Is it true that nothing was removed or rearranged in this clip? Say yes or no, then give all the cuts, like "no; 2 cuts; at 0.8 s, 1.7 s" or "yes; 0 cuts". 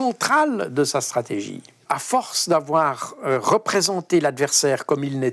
no; 1 cut; at 1.8 s